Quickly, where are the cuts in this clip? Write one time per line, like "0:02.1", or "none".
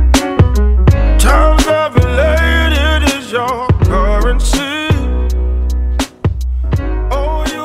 none